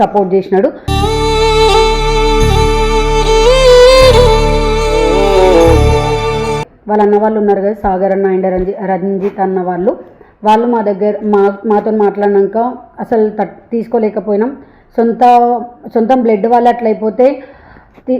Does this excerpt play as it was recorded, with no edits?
no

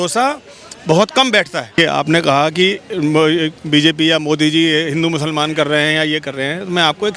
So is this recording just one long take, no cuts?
no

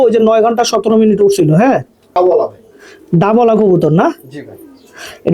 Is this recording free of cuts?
yes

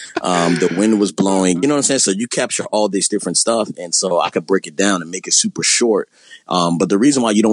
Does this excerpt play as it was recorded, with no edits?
yes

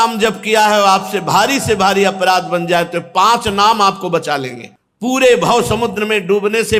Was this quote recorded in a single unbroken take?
yes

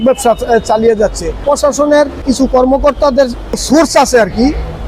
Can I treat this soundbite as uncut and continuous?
no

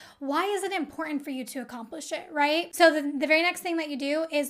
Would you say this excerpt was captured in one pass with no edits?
no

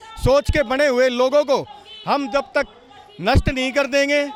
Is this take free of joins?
yes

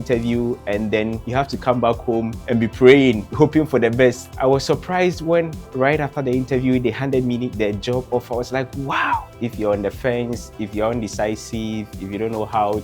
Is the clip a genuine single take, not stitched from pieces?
no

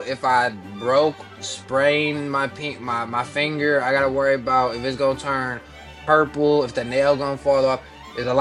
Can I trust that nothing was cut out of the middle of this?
yes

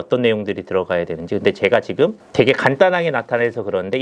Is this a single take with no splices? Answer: no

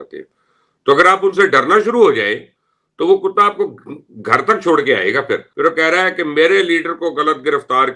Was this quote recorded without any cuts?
no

